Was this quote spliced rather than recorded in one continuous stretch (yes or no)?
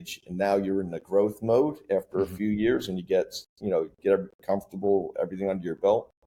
no